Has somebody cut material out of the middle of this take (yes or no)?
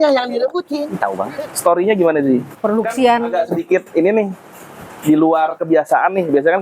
yes